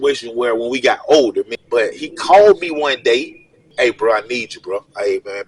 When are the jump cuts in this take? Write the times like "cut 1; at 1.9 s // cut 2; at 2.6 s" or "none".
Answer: cut 1; at 1.6 s // cut 2; at 3.7 s